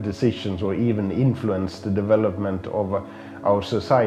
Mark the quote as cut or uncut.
uncut